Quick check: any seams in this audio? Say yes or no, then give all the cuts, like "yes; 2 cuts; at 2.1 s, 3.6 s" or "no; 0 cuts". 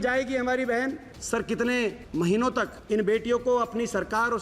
yes; 2 cuts; at 1.1 s, 2.5 s